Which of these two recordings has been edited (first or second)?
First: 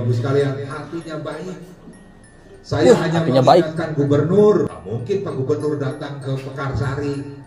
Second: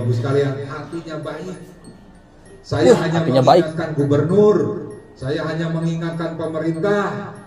first